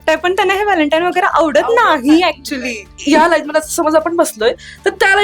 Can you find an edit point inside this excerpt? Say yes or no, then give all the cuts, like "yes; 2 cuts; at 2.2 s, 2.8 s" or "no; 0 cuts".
yes; 1 cut; at 2.9 s